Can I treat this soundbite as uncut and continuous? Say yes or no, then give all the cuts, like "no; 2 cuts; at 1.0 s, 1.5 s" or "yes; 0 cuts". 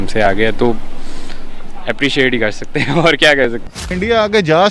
no; 1 cut; at 3.7 s